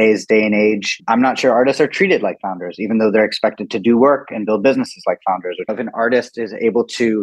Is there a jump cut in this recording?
yes; 2 cuts; at 1.0 s, 5.8 s

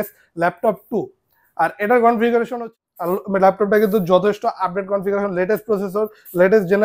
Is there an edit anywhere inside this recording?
yes; 1 cut; at 2.7 s

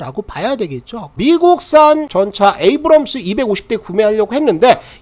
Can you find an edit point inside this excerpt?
yes; 2 cuts; at 1.1 s, 2.1 s

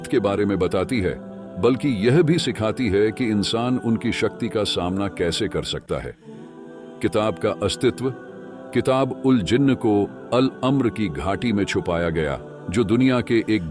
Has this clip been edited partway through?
no; 0 cuts

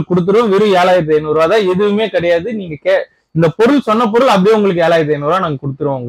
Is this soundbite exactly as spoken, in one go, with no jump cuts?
yes; 0 cuts

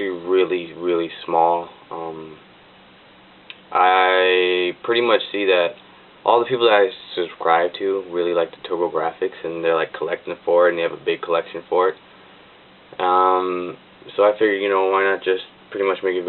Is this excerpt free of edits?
yes; 0 cuts

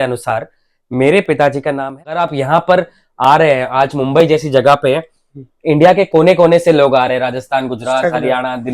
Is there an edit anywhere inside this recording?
yes; 1 cut; at 2.0 s

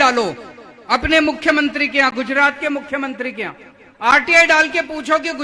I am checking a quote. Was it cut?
no; 0 cuts

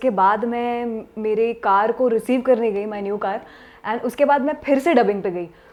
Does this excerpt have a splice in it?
no; 0 cuts

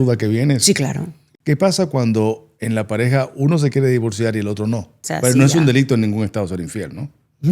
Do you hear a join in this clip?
yes; 2 cuts; at 1.1 s, 5.0 s

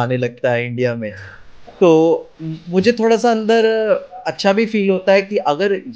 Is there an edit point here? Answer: no; 0 cuts

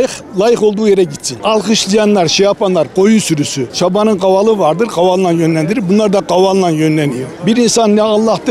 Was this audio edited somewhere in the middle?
no; 0 cuts

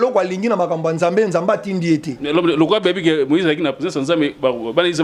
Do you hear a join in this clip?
no; 0 cuts

